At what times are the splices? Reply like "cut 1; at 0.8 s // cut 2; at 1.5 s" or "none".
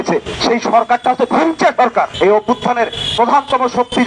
cut 1; at 2.1 s